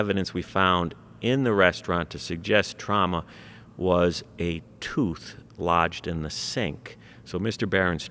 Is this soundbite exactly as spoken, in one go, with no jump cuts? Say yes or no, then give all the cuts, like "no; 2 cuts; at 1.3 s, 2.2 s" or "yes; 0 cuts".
yes; 0 cuts